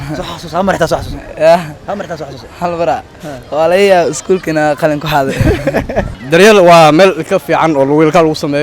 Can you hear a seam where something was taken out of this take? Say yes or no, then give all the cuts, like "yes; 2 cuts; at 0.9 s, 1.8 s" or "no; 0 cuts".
yes; 1 cut; at 6.1 s